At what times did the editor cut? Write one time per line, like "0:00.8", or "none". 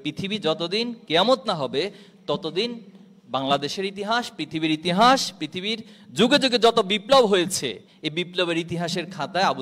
none

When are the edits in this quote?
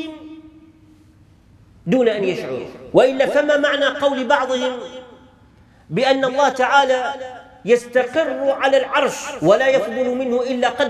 0:02.7
0:09.3

